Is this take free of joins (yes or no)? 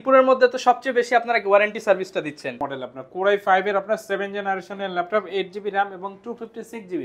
no